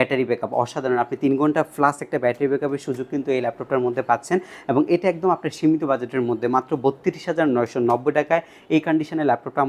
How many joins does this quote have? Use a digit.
0